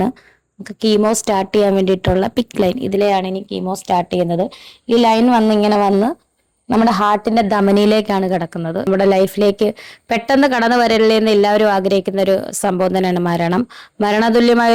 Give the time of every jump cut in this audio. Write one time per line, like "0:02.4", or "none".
0:08.9